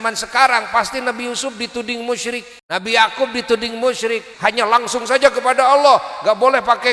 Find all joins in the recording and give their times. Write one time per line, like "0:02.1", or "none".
0:02.5
0:04.3